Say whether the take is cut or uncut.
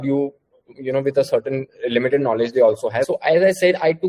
cut